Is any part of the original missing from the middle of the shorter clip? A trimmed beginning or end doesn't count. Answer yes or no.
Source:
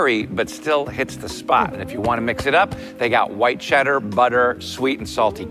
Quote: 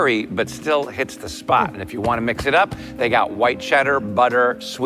no